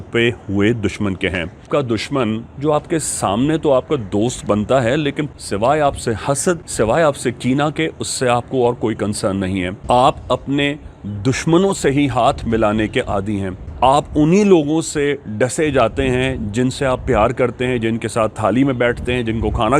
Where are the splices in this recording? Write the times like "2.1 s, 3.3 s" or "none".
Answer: 1.7 s, 5.3 s, 6.7 s, 9.7 s, 13.6 s